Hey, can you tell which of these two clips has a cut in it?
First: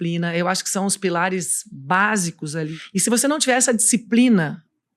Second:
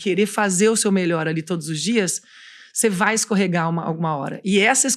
first; 1 cut; at 2.8 s

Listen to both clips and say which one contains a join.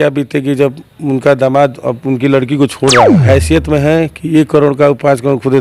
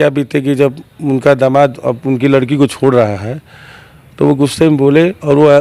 first; 1 cut; at 3.2 s

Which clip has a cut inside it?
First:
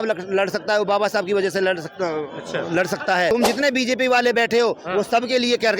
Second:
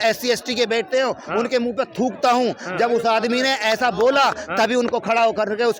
first; 1 cut; at 3.3 s

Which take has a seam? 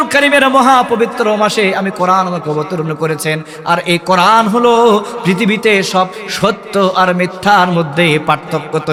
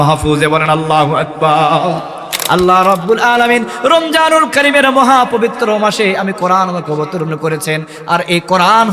second; 1 cut; at 2.4 s

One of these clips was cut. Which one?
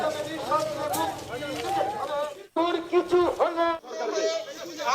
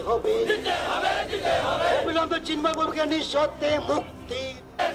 first; 1 cut; at 3.8 s

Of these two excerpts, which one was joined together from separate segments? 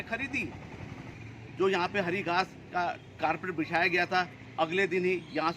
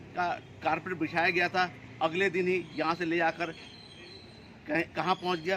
first; 1 cut; at 1.1 s

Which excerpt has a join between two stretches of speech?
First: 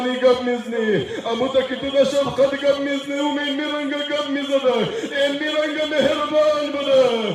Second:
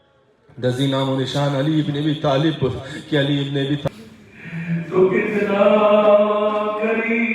second; 1 cut; at 3.9 s

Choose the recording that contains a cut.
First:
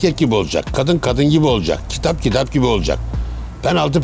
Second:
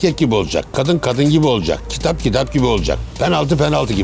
second; 1 cut; at 3.1 s

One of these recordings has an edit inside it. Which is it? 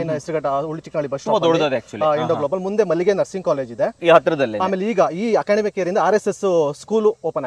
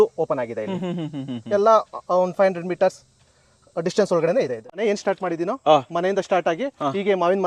second; 1 cut; at 4.6 s

